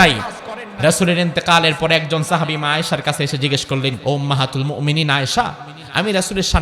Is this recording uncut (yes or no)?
no